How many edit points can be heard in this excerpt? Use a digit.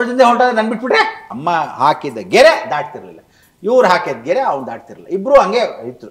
1